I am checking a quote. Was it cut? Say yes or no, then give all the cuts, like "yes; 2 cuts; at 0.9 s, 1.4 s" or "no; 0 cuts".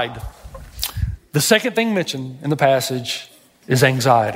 no; 0 cuts